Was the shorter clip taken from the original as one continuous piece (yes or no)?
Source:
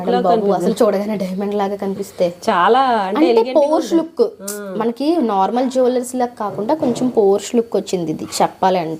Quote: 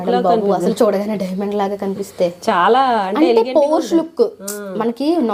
yes